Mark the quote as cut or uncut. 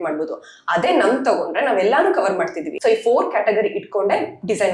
cut